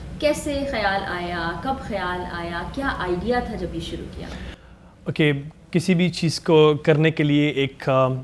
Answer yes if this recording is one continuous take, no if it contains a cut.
yes